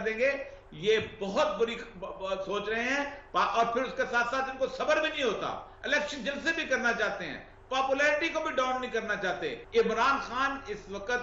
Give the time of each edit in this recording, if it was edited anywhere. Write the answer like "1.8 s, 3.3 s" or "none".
9.6 s